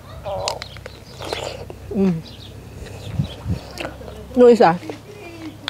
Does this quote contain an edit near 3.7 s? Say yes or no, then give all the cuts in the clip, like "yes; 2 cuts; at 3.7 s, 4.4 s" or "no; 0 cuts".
yes; 1 cut; at 3.7 s